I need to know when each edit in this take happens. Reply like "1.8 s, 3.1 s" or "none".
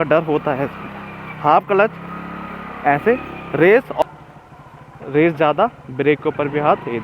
4.0 s